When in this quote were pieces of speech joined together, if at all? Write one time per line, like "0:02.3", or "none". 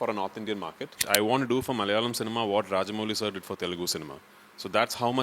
0:01.0